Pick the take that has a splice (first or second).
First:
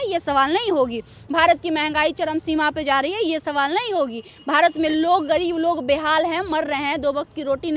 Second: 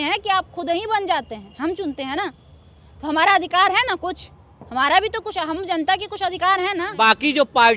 second